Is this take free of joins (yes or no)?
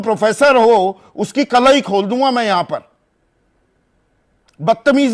yes